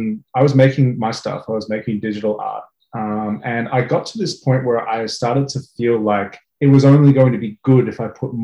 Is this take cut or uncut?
cut